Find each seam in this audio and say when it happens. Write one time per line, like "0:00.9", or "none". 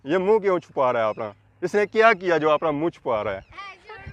none